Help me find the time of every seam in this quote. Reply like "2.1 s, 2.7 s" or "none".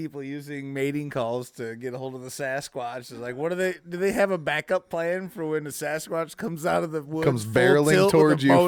none